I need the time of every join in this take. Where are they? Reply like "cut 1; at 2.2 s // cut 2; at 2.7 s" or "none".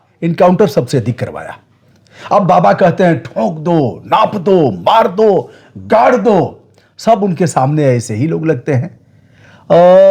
none